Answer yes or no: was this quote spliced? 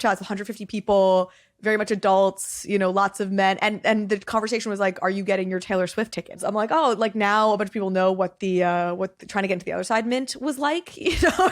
yes